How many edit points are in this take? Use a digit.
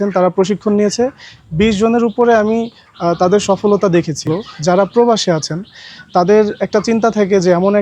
1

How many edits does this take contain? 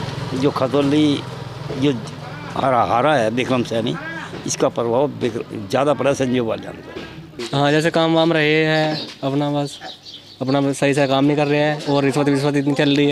1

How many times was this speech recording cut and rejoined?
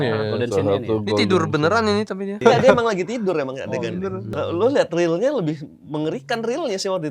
2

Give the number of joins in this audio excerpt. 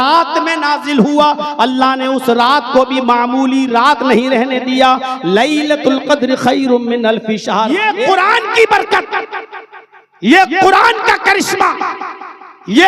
1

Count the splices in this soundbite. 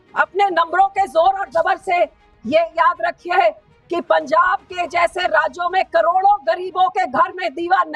0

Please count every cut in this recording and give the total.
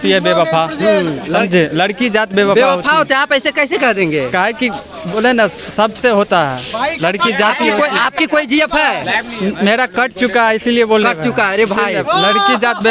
0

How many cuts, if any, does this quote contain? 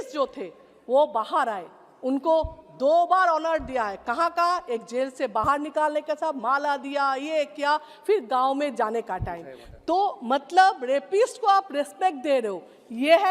0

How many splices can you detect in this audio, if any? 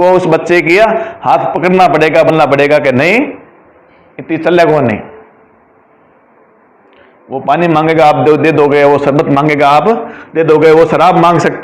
1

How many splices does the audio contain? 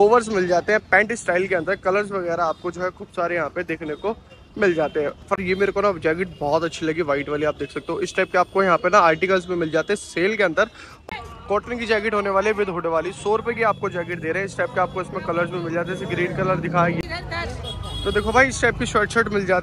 3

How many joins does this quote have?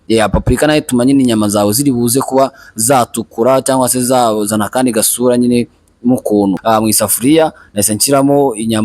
1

